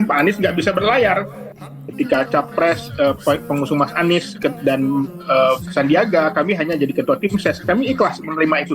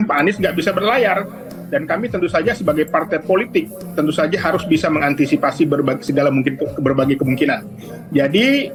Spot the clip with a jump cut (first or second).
first